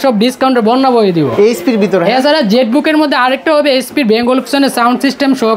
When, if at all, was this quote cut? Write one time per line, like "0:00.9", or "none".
none